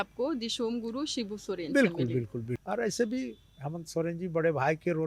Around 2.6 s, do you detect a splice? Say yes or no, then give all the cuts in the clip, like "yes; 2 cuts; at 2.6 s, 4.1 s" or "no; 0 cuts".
yes; 1 cut; at 2.6 s